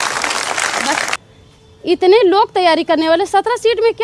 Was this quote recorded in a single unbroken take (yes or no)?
no